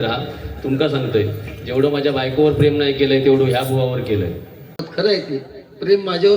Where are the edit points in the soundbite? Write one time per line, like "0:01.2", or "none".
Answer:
0:04.9